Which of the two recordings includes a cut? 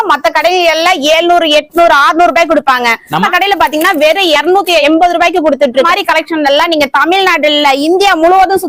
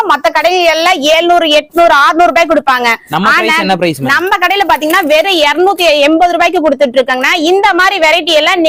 first; 3 cuts; at 3.3 s, 4.5 s, 5.9 s

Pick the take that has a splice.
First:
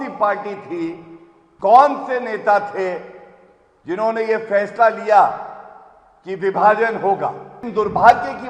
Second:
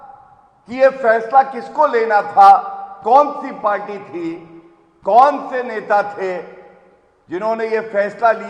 first; 1 cut; at 7.5 s

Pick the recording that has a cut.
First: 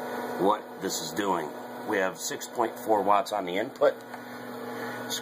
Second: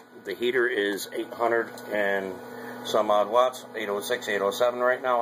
second; 1 cut; at 1.8 s

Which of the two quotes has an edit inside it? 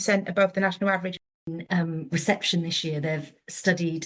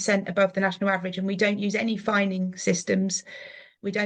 first; 1 cut; at 1.4 s

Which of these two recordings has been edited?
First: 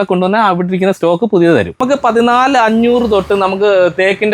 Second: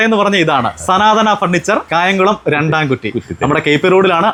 first; 1 cut; at 1.7 s

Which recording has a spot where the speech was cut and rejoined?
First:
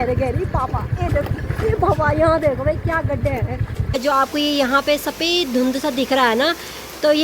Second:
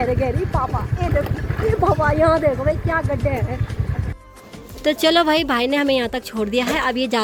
first; 1 cut; at 4.0 s

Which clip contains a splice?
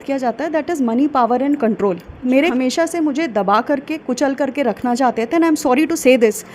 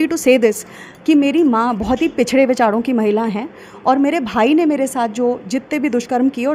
first; 1 cut; at 2.5 s

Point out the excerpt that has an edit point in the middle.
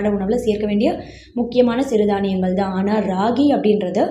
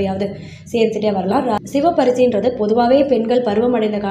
second; 1 cut; at 1.6 s

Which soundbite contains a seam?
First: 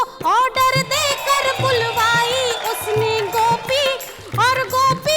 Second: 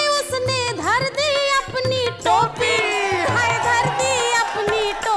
first; 1 cut; at 1.2 s

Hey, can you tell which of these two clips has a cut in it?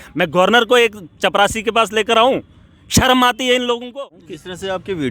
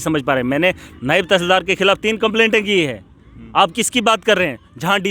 first; 1 cut; at 3.9 s

